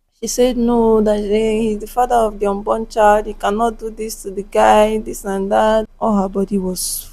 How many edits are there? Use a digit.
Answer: 1